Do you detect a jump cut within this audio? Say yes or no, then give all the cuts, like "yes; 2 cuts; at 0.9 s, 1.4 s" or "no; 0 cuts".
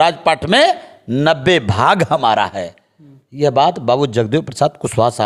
no; 0 cuts